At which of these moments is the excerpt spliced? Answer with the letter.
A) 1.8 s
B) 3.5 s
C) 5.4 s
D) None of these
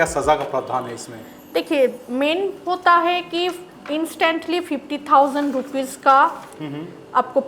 D